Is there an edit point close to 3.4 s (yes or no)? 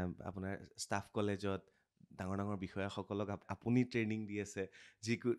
yes